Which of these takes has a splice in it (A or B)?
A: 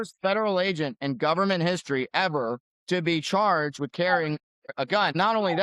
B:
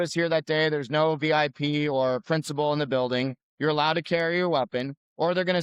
A